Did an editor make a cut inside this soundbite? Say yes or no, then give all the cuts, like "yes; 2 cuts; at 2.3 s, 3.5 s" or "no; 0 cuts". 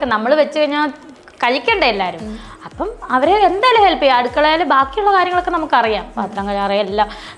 no; 0 cuts